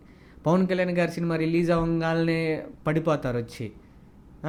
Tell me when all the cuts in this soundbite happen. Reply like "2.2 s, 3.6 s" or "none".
none